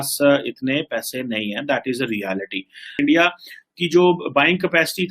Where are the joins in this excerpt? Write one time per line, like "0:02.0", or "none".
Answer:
0:03.0